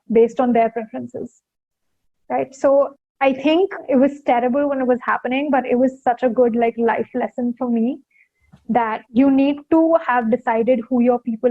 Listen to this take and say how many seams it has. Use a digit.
2